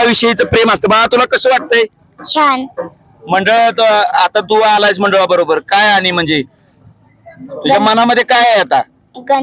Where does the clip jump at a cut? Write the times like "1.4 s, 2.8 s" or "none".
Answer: none